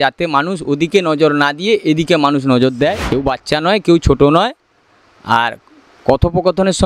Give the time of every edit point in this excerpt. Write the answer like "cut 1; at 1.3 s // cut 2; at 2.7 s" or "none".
cut 1; at 3.0 s